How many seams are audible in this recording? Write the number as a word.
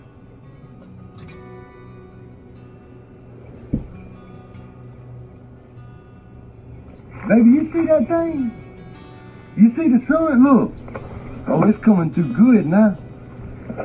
one